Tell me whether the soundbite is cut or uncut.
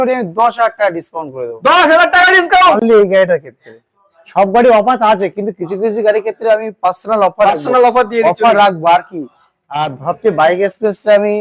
uncut